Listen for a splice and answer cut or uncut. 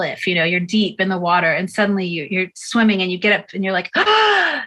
uncut